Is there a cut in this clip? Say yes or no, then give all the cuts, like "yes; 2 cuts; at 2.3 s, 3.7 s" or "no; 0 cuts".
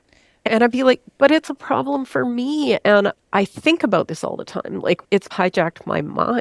yes; 1 cut; at 5.0 s